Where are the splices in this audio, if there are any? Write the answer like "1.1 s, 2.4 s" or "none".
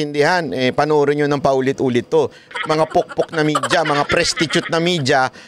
2.4 s